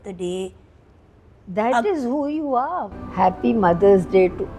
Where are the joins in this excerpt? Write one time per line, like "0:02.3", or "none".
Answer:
0:03.0